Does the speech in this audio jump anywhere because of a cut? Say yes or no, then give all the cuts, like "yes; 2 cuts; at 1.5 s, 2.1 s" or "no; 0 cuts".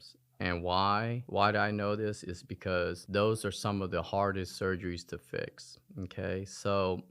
no; 0 cuts